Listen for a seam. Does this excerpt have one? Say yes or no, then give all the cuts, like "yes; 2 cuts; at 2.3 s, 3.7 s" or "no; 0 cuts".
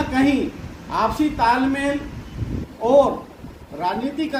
no; 0 cuts